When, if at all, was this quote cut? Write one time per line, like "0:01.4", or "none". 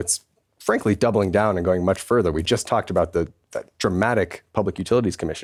none